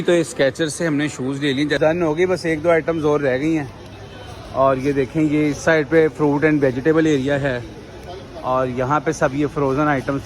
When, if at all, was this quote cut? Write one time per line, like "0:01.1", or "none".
0:01.8